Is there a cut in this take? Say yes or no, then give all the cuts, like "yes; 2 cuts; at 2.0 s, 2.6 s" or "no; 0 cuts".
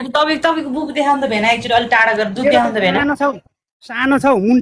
no; 0 cuts